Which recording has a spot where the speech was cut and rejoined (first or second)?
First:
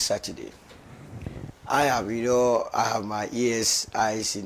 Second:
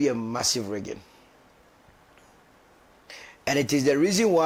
first